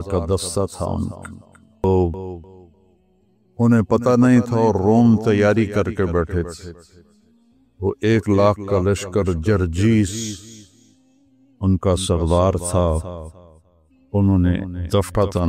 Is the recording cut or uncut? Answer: cut